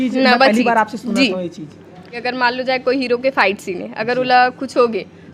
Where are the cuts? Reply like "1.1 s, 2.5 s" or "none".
2.2 s